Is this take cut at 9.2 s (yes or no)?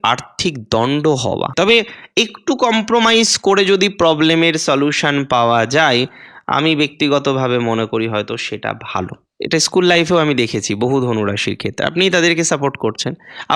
yes